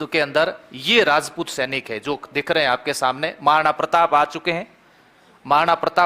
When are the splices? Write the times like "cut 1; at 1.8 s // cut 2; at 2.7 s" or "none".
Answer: none